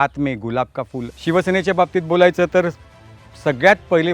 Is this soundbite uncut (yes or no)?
no